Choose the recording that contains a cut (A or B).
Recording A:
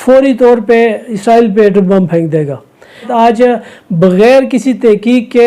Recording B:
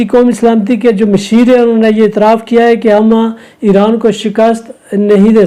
A